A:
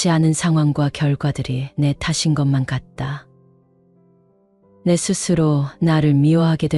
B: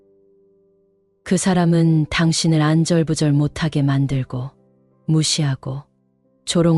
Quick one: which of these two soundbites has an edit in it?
A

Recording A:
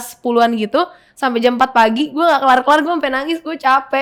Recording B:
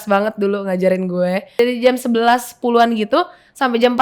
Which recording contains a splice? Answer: B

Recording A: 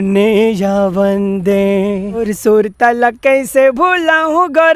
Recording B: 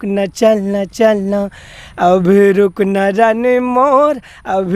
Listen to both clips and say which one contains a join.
A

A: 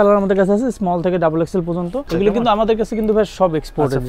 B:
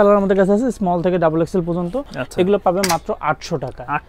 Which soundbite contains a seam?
A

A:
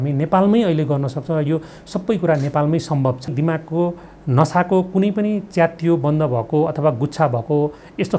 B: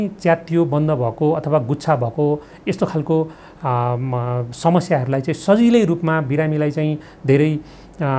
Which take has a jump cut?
A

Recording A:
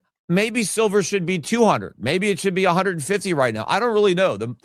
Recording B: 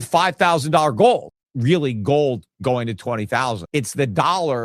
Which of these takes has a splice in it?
B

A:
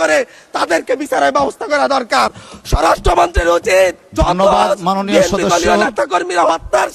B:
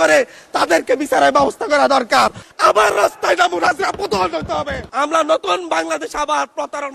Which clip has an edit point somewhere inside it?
B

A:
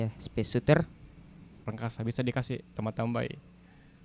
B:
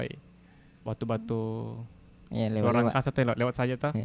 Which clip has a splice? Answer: A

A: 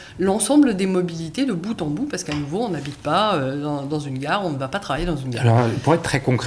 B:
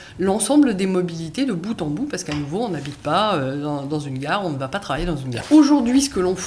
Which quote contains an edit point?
B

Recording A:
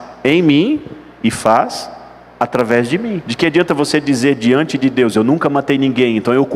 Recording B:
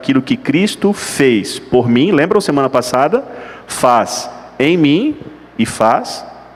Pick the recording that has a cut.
A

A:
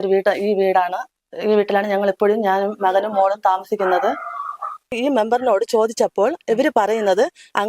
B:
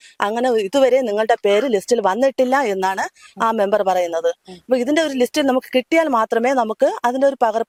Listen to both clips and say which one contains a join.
A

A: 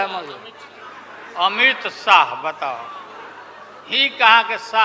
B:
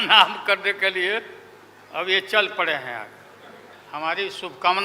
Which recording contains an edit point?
B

